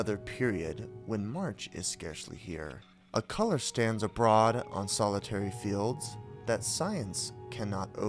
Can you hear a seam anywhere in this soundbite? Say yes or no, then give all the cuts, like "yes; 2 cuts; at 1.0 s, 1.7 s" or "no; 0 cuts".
yes; 1 cut; at 3.1 s